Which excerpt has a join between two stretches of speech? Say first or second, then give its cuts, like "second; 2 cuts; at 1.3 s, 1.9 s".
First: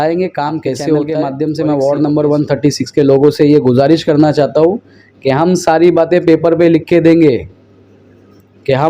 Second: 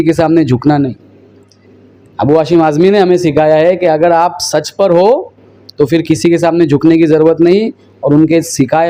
first; 1 cut; at 1.1 s